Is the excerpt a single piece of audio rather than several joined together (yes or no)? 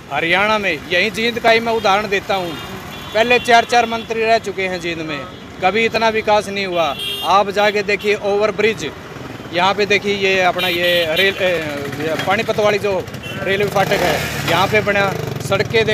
yes